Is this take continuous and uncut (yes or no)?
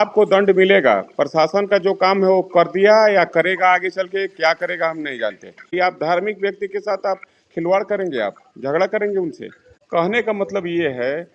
yes